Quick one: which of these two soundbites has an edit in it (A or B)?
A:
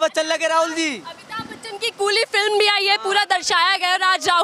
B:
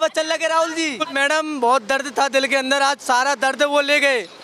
B